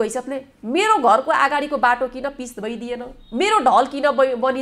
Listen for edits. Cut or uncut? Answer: uncut